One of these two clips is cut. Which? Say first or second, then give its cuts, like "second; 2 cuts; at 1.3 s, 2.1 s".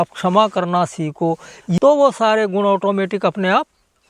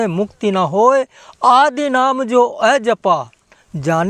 first; 1 cut; at 1.8 s